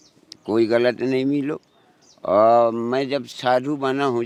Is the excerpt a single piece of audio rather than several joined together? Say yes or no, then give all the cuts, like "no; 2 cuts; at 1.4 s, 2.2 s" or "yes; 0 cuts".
yes; 0 cuts